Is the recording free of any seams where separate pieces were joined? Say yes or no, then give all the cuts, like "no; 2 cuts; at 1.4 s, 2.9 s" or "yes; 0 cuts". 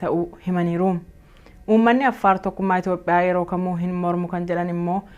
no; 1 cut; at 3.0 s